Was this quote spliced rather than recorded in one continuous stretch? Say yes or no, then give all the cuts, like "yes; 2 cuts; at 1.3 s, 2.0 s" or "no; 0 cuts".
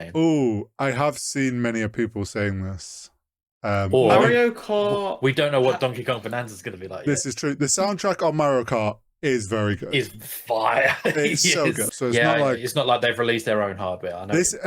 yes; 1 cut; at 11.8 s